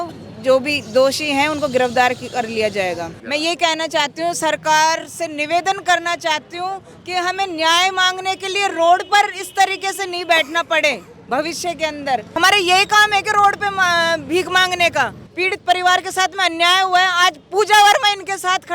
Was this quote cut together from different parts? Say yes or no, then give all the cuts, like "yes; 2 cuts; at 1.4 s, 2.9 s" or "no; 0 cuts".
yes; 3 cuts; at 3.1 s, 12.3 s, 15.2 s